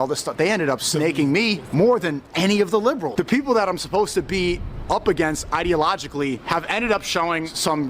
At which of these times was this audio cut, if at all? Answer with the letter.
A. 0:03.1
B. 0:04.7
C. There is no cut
A